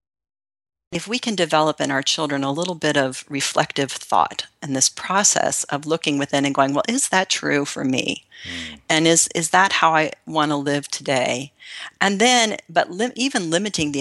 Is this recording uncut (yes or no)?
no